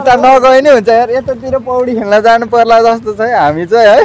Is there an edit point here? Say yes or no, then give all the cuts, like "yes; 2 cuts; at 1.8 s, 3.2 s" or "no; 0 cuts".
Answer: no; 0 cuts